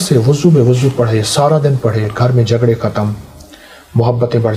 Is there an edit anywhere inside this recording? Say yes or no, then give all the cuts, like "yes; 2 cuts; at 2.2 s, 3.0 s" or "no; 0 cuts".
no; 0 cuts